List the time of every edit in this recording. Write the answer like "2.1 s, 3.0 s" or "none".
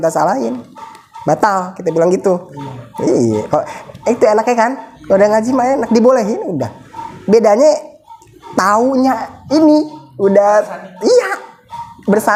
none

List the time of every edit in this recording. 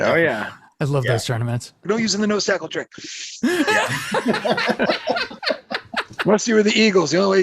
1.8 s

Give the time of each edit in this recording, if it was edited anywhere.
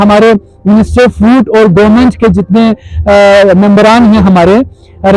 none

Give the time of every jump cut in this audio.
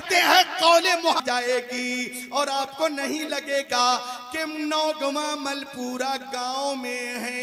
1.2 s

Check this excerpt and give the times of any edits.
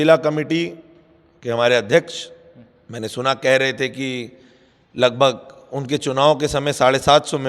none

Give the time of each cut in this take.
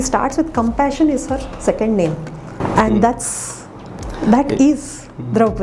2.6 s

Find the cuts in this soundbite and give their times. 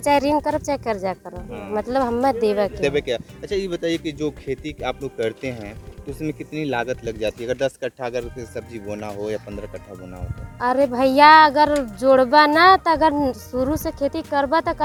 none

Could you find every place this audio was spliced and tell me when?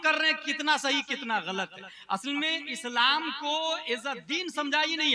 none

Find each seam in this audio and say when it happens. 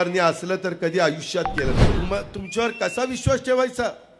1.9 s

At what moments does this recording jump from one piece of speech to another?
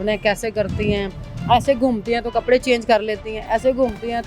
none

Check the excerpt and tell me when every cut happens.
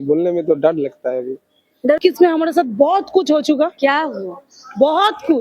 2.0 s

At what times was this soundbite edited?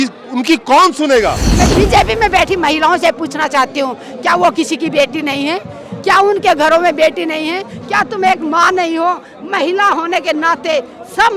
1.6 s

